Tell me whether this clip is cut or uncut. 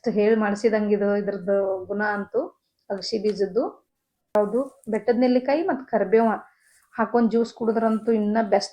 cut